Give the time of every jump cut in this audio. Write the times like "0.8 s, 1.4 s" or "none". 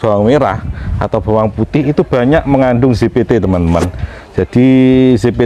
none

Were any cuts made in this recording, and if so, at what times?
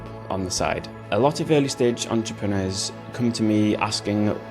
1.0 s

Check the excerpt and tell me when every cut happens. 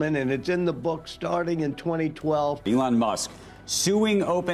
2.6 s

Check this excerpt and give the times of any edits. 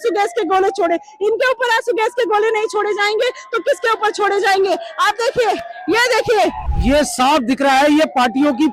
6.7 s

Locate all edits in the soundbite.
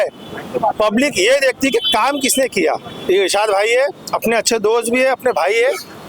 2.9 s

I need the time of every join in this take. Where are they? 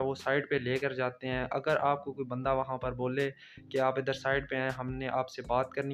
none

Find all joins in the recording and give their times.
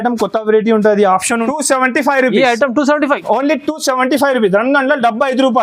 1.4 s

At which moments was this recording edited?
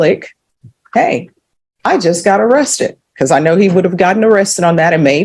none

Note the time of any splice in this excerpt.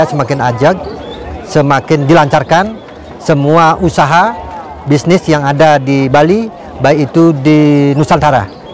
none

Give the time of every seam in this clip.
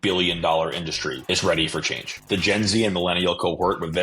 1.2 s, 2.2 s

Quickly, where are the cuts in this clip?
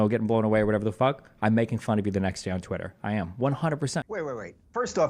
4.1 s

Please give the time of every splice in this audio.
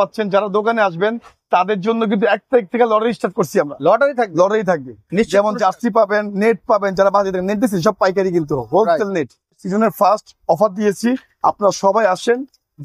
9.6 s

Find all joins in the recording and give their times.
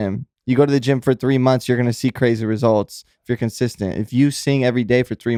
none

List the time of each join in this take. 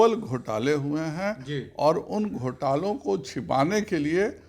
none

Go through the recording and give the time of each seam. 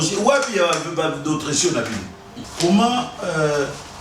2.4 s

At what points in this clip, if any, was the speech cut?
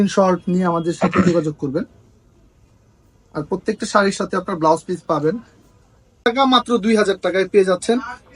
6.2 s

